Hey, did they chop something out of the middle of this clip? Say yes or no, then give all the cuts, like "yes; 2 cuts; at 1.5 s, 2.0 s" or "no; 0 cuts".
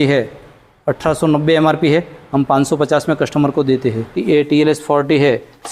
yes; 1 cut; at 4.1 s